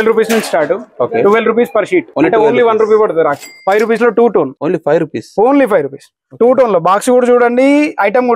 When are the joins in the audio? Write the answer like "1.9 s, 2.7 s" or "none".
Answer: 2.1 s, 3.5 s, 4.6 s